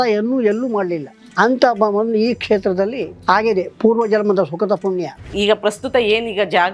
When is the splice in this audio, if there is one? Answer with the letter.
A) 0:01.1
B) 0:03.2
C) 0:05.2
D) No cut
C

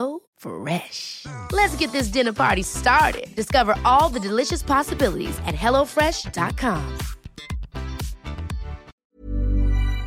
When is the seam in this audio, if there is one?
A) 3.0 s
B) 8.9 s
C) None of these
B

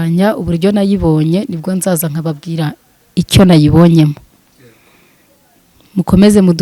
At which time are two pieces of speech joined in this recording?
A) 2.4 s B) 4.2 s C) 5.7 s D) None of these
D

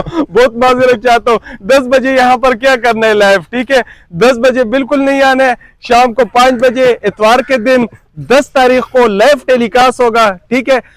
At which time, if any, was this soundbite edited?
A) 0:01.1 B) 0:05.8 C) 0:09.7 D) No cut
D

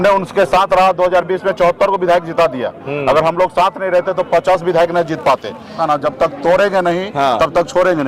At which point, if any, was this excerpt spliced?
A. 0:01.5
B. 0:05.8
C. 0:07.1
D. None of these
B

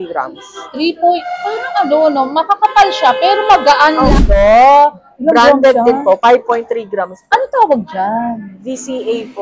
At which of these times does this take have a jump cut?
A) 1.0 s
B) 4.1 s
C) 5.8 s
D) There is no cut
B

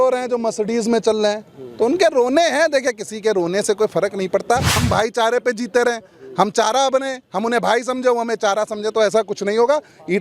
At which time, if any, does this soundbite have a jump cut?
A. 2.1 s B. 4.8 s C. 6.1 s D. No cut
B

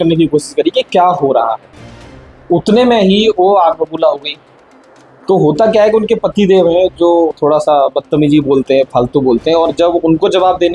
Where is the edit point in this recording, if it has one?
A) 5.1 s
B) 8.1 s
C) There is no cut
C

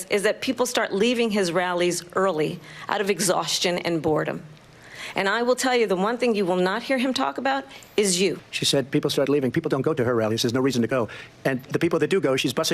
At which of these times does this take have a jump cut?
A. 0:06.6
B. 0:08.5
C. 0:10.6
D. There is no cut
B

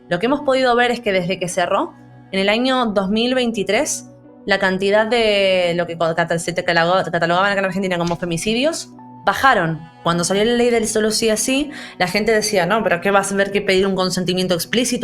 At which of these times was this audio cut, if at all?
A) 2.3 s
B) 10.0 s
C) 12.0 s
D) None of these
B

